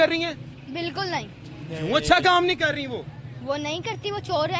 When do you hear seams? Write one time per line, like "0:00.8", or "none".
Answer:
none